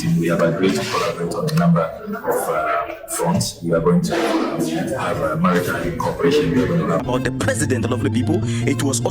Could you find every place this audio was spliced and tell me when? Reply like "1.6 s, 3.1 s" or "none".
7.0 s